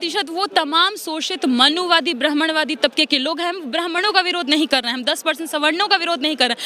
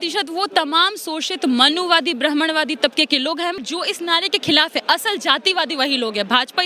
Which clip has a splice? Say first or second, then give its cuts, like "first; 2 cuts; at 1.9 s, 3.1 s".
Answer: second; 1 cut; at 3.7 s